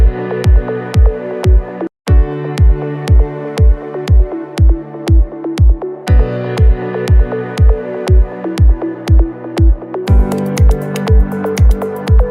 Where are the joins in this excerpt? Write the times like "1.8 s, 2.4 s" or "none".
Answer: 2.1 s, 8.5 s